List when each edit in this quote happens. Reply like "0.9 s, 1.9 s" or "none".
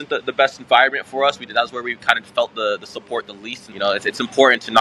3.6 s

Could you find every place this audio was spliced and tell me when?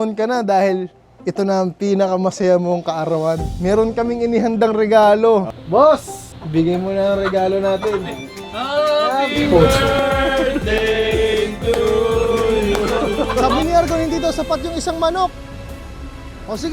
5.5 s, 13.5 s

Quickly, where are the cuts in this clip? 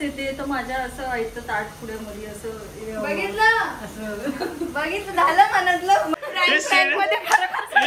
3.9 s, 6.1 s

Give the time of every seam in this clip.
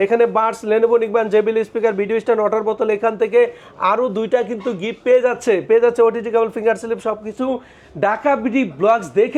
none

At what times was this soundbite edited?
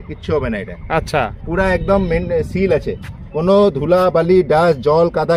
none

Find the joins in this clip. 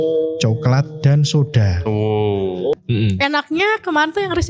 2.7 s

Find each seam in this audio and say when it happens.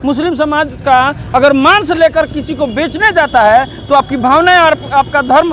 none

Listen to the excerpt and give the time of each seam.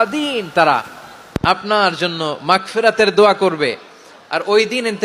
none

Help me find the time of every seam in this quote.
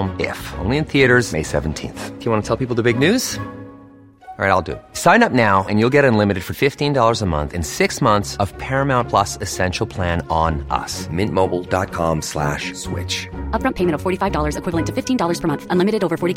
none

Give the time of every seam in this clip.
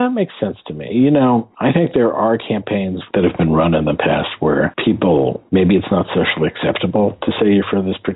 3.0 s, 5.4 s

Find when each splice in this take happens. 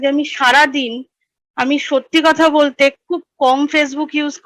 none

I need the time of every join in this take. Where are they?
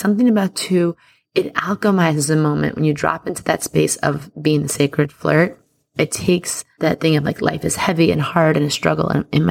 5.8 s, 6.6 s

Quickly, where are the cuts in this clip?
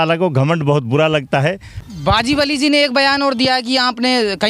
1.3 s

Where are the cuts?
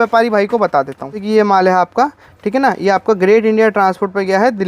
1.2 s

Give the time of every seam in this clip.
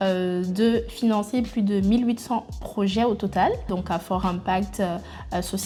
none

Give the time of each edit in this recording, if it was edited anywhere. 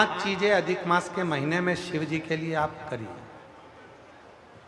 none

